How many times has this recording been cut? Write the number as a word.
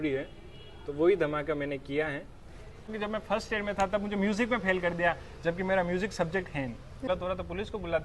two